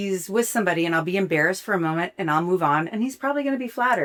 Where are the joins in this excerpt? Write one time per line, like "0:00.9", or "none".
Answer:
none

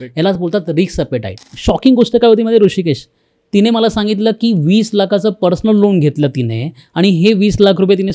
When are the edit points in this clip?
0:01.4

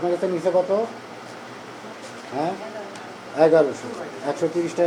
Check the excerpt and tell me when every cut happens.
none

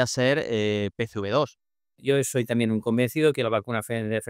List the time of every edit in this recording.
0:01.9

